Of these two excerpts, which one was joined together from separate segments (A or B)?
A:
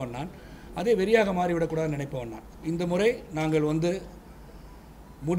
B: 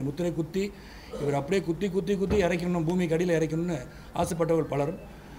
A